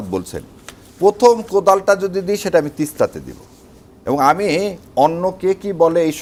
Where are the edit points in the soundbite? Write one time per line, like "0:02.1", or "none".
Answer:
none